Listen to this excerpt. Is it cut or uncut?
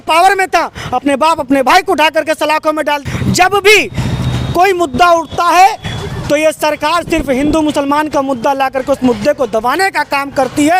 cut